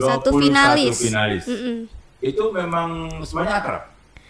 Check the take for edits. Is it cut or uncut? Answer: uncut